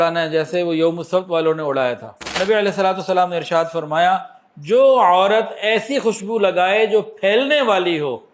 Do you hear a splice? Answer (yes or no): yes